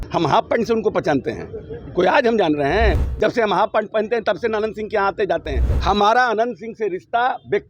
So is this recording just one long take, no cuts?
no; 2 cuts; at 2.9 s, 5.7 s

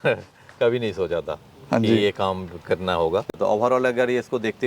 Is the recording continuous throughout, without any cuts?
no; 1 cut; at 3.3 s

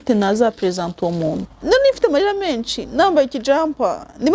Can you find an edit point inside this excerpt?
yes; 1 cut; at 1.5 s

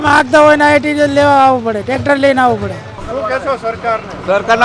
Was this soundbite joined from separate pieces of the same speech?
yes; 1 cut; at 2.9 s

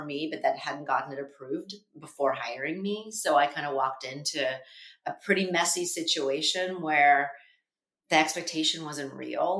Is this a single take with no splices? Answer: yes; 0 cuts

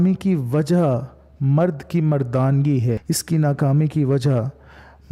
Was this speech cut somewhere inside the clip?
yes; 1 cut; at 3.0 s

